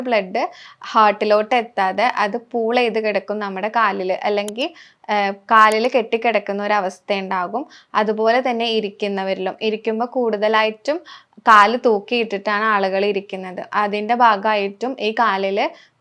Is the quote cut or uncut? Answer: uncut